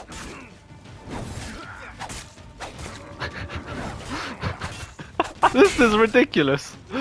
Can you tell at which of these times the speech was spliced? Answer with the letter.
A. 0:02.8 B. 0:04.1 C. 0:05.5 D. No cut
C